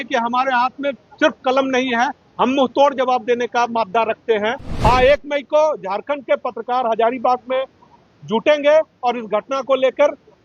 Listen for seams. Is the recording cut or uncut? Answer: cut